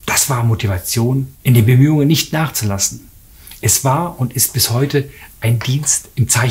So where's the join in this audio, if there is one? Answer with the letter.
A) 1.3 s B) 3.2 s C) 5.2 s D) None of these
A